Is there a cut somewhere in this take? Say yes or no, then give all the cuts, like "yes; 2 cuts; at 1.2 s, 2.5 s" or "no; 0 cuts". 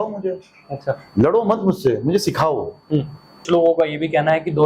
yes; 1 cut; at 3.4 s